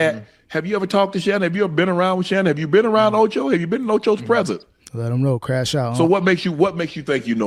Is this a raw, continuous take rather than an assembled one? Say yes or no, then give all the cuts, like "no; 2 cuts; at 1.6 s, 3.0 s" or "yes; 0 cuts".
yes; 0 cuts